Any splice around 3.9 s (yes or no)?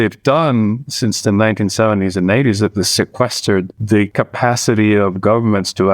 yes